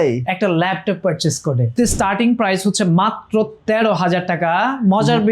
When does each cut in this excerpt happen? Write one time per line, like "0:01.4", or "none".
0:01.7